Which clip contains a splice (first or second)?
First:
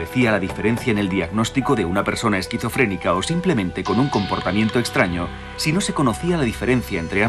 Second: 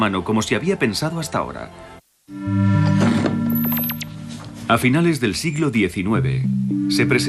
second